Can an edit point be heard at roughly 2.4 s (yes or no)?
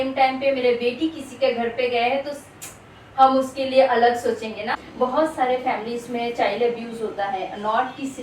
no